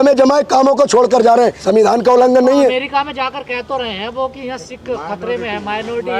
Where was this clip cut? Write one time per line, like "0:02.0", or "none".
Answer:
none